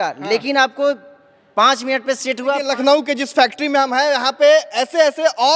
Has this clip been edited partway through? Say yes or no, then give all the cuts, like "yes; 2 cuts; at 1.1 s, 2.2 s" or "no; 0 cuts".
yes; 1 cut; at 2.7 s